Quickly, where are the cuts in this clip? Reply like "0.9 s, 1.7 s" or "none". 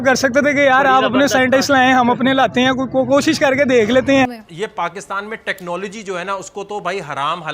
4.3 s